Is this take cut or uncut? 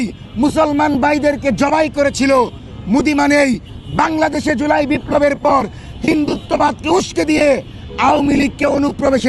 uncut